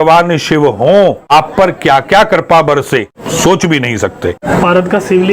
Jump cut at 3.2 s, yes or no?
yes